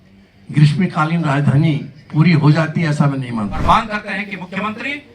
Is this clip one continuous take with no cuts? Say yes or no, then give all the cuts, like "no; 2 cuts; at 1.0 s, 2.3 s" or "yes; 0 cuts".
no; 1 cut; at 3.6 s